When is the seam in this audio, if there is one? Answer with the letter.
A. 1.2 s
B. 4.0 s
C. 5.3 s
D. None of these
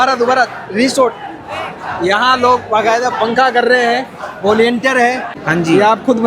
C